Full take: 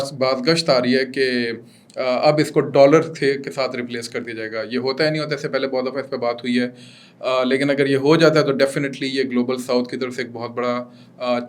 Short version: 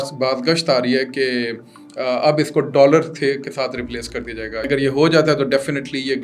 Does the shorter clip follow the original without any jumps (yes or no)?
no